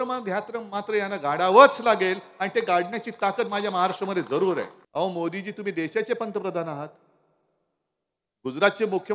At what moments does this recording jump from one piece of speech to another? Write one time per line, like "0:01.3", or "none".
0:04.8